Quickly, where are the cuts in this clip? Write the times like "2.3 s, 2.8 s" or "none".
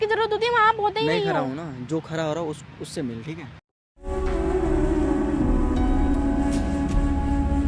none